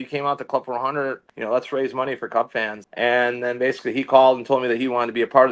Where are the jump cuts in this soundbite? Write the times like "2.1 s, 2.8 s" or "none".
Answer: 1.3 s, 2.8 s